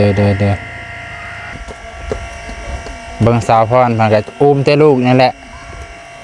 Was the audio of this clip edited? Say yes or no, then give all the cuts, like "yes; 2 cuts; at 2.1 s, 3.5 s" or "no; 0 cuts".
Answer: yes; 1 cut; at 1.7 s